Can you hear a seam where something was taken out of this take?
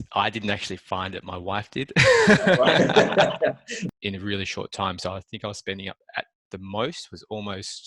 yes; 1 cut; at 3.8 s

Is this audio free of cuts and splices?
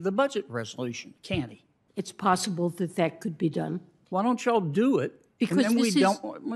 no; 1 cut; at 3.9 s

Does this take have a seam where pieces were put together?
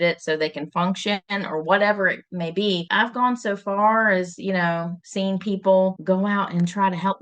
yes; 2 cuts; at 2.9 s, 6.0 s

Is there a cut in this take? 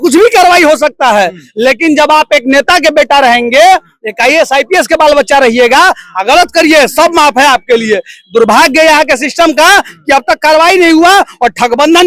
no; 0 cuts

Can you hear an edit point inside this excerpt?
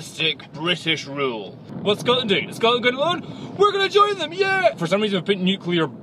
yes; 2 cuts; at 1.7 s, 4.8 s

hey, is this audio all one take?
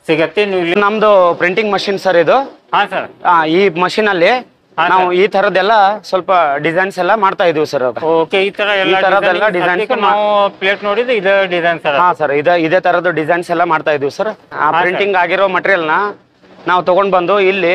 no; 2 cuts; at 0.8 s, 14.5 s

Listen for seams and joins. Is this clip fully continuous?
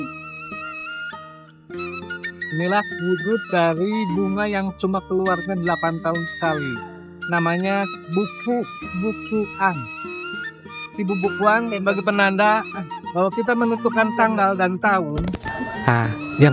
no; 1 cut; at 15.5 s

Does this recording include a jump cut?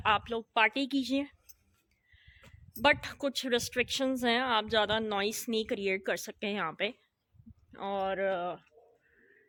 no; 0 cuts

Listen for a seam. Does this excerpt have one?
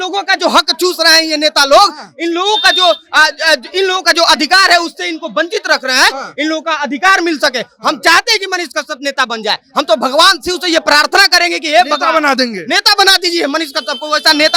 no; 0 cuts

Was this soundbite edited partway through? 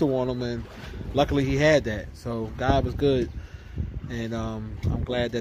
no; 0 cuts

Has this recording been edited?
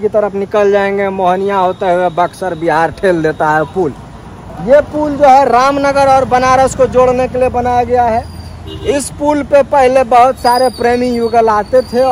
no; 0 cuts

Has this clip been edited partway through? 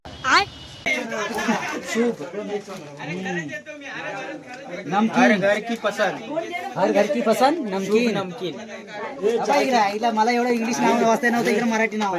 no; 0 cuts

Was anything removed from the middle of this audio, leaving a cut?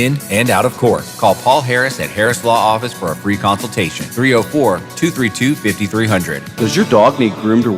no; 0 cuts

